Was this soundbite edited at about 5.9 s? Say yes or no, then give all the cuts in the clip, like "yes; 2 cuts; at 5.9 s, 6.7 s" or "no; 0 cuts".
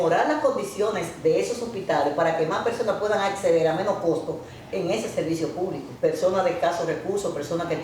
yes; 1 cut; at 5.9 s